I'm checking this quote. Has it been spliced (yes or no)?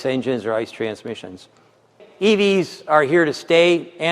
yes